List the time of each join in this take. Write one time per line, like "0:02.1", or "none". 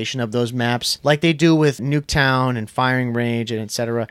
0:00.9
0:01.8